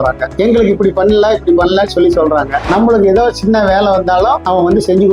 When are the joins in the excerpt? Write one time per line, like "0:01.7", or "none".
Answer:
0:02.7